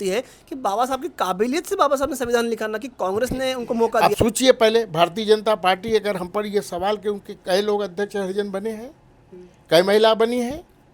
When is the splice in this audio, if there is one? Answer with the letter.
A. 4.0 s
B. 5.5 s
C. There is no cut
A